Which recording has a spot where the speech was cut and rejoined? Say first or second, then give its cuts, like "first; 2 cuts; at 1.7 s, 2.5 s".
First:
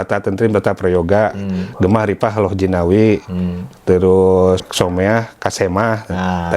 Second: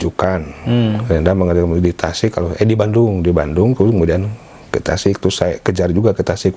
first; 1 cut; at 4.6 s